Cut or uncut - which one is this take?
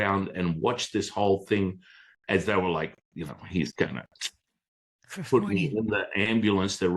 uncut